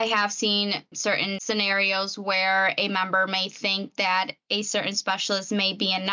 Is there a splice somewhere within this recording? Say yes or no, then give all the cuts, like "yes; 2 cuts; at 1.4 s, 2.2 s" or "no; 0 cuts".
yes; 1 cut; at 0.9 s